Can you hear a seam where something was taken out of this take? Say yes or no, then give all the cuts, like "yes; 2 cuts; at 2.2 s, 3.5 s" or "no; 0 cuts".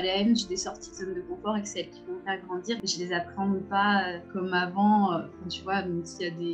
yes; 2 cuts; at 2.8 s, 4.2 s